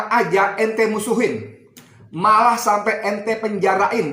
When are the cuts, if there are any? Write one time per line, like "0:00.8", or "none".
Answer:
none

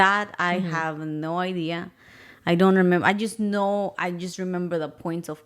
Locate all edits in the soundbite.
none

